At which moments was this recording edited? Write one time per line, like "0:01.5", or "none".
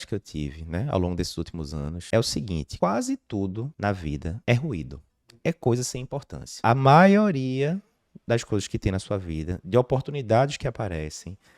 0:02.0
0:02.7
0:04.1
0:06.6